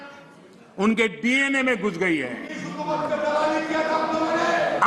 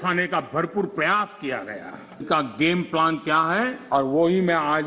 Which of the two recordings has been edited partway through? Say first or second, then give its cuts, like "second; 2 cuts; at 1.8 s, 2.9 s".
second; 2 cuts; at 2.2 s, 3.8 s